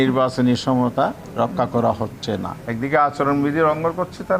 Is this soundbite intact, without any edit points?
no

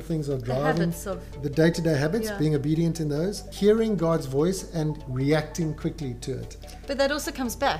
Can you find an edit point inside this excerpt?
yes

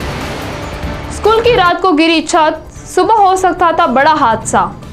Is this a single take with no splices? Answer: no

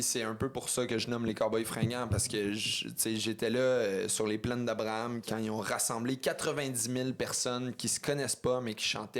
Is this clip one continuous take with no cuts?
no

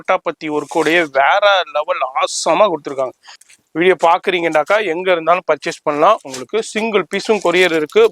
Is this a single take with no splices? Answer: no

